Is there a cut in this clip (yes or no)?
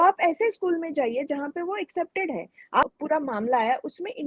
yes